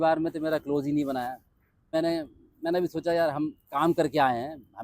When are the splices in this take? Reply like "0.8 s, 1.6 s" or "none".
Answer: 1.9 s